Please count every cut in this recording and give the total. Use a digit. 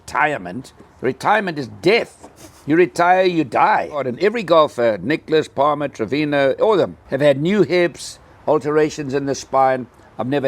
2